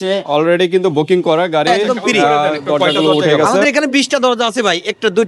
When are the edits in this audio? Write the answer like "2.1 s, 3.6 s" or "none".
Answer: 3.6 s